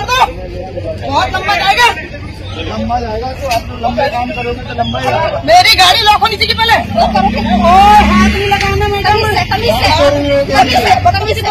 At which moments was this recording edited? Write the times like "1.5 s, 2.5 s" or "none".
none